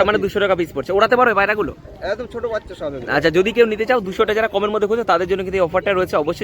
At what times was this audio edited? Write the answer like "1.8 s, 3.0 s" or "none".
none